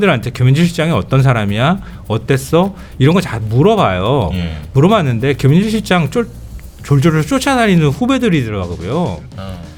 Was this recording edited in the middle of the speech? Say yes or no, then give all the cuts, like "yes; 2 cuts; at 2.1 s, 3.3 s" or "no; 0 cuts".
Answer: no; 0 cuts